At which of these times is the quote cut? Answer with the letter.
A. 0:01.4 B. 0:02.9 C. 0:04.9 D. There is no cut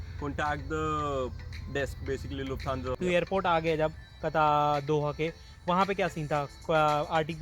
B